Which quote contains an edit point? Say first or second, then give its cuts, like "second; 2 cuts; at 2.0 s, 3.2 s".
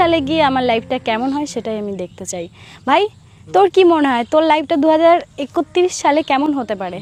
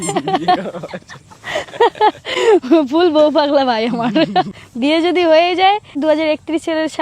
second; 2 cuts; at 4.6 s, 6.0 s